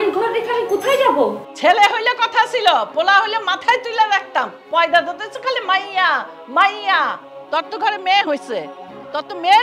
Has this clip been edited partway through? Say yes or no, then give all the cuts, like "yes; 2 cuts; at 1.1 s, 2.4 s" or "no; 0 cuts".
yes; 2 cuts; at 1.4 s, 7.2 s